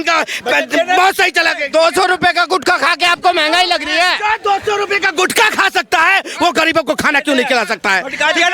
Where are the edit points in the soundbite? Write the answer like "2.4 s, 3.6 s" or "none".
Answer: none